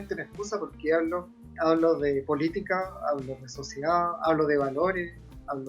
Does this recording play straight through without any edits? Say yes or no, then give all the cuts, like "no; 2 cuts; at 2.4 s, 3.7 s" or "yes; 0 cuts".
no; 1 cut; at 1.5 s